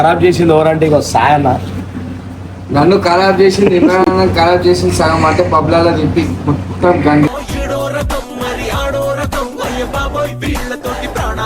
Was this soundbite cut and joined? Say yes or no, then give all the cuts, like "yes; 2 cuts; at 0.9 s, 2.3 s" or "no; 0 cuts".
no; 0 cuts